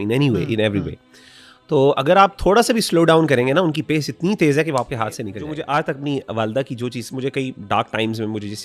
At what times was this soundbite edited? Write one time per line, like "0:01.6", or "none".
0:05.4